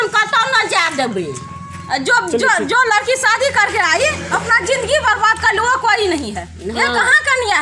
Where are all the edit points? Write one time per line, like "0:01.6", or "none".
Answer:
none